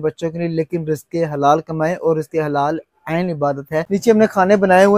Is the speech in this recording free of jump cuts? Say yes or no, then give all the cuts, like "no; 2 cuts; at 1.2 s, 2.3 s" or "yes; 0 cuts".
no; 1 cut; at 3.9 s